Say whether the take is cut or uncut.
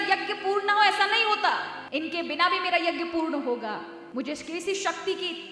cut